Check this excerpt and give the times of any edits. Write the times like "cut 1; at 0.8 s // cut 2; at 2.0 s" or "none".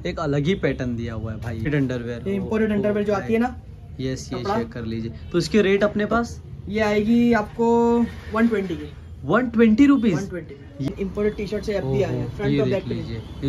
cut 1; at 1.7 s // cut 2; at 10.9 s